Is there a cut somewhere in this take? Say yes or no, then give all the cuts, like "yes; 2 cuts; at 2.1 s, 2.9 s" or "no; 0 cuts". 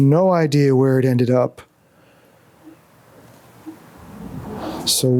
no; 0 cuts